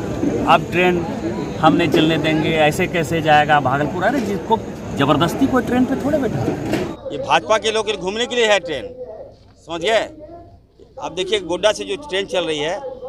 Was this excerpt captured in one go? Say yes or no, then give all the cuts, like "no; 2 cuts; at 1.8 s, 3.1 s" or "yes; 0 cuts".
no; 1 cut; at 7.0 s